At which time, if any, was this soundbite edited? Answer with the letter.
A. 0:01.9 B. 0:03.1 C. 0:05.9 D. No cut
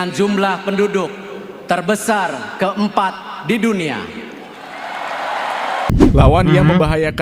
C